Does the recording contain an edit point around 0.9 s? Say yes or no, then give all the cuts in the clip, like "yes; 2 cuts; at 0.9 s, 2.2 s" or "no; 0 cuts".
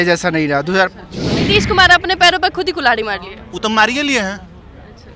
yes; 1 cut; at 0.9 s